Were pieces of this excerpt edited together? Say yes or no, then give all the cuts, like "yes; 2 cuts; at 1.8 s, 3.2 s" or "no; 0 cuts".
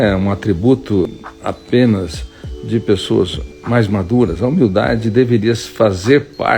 yes; 2 cuts; at 1.1 s, 3.5 s